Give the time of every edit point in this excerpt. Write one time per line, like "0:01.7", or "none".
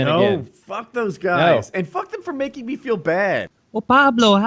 0:03.6